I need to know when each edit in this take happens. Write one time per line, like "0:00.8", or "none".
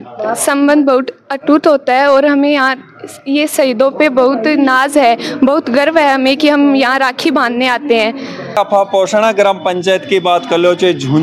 none